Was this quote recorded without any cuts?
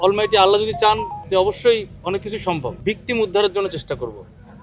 no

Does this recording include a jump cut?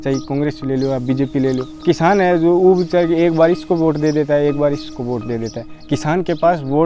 yes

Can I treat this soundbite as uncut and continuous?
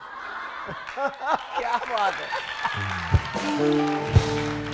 yes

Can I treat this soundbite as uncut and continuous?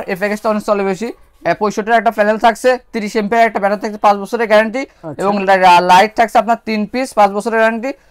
yes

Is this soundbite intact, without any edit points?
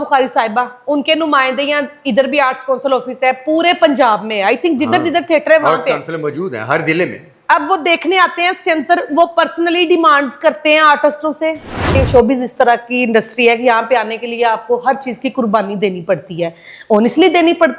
no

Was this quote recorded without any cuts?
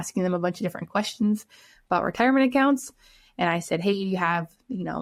yes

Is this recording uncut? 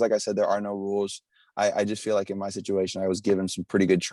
yes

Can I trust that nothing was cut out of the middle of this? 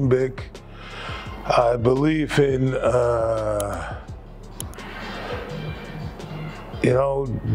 yes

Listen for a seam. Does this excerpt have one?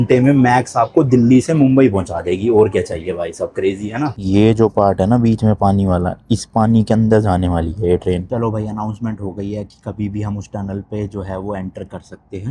yes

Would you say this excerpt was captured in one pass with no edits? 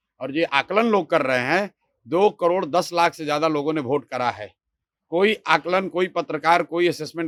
yes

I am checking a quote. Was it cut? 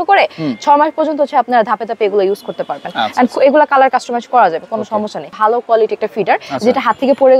yes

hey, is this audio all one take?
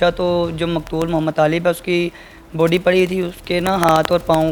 yes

